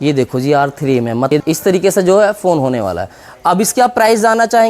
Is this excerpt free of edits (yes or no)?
no